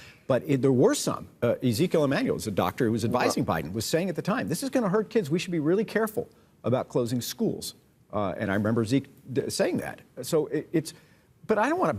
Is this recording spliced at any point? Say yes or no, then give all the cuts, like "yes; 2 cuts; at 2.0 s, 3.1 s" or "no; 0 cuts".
no; 0 cuts